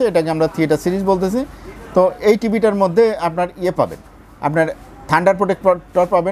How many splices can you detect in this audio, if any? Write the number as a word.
zero